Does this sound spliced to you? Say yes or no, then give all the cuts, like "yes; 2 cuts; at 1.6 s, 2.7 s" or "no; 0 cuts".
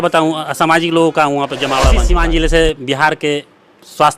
yes; 1 cut; at 2.0 s